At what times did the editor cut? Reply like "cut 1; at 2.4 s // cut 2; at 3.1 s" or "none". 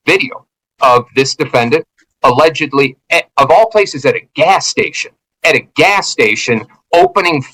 none